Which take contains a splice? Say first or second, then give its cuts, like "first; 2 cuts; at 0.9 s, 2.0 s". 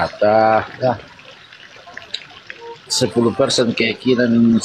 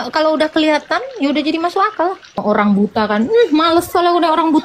second; 1 cut; at 2.4 s